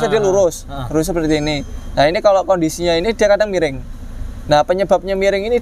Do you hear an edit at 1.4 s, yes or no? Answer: no